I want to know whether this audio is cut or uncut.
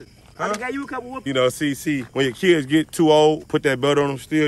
cut